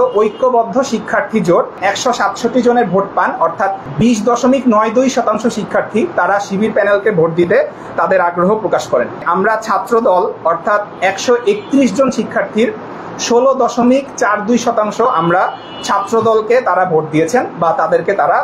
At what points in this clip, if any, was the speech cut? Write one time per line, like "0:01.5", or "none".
0:01.8
0:03.8
0:09.3